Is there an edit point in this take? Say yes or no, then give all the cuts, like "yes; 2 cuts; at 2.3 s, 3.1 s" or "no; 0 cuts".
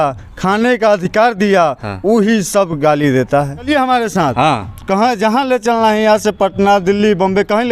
yes; 1 cut; at 3.7 s